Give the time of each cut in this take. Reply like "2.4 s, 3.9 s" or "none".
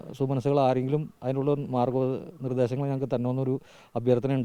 none